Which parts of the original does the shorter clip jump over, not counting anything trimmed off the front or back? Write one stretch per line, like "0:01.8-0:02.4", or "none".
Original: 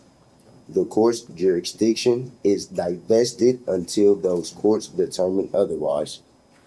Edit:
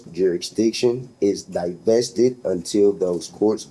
none